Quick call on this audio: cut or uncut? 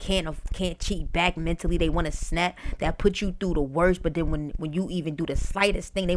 uncut